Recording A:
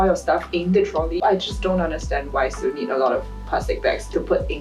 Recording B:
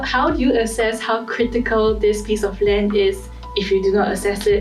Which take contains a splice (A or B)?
A